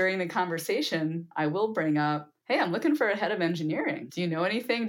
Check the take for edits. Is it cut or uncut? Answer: cut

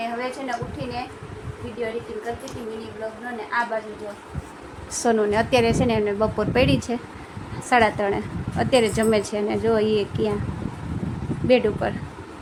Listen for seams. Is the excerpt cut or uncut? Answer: uncut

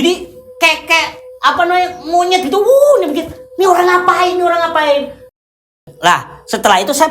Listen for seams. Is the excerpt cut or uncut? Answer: cut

